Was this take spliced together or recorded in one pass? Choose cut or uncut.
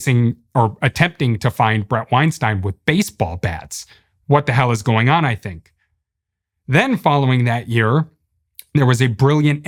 uncut